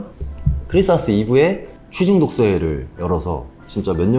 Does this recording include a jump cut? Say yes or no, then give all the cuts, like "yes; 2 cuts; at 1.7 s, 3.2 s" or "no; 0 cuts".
no; 0 cuts